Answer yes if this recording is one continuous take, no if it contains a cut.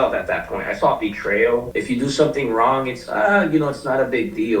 no